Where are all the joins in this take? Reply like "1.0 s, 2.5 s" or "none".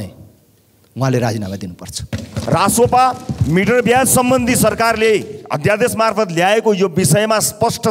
2.4 s